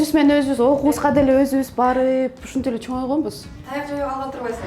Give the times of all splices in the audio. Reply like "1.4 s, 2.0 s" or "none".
none